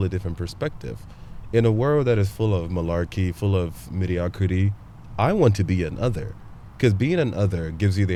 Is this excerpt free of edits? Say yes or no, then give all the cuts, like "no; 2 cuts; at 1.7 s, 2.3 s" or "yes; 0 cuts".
yes; 0 cuts